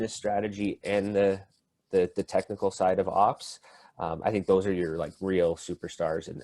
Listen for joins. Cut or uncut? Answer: uncut